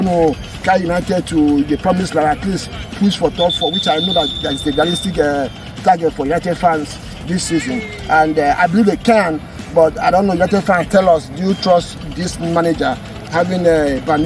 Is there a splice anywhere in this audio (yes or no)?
no